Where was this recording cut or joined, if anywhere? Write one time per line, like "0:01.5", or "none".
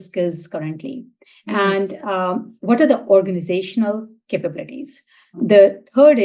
0:05.3